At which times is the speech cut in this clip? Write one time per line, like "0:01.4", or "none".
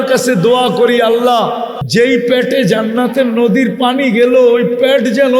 0:01.7